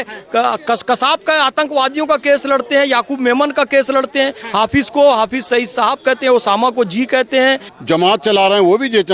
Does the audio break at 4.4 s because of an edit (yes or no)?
no